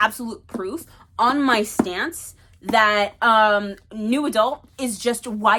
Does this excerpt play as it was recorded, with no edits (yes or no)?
yes